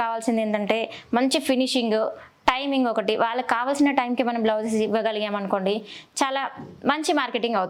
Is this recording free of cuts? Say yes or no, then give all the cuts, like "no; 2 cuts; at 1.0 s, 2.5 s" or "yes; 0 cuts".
yes; 0 cuts